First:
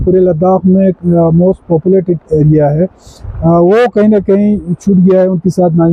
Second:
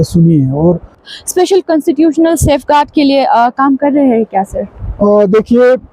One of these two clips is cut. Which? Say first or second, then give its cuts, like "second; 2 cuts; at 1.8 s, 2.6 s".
second; 1 cut; at 1.1 s